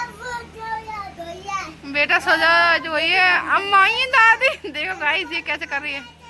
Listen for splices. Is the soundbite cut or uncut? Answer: uncut